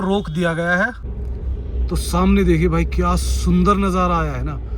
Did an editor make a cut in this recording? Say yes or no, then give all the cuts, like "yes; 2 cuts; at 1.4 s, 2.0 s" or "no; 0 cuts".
yes; 1 cut; at 1.1 s